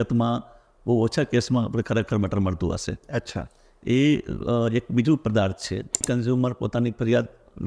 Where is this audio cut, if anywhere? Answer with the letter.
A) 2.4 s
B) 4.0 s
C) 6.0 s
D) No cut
C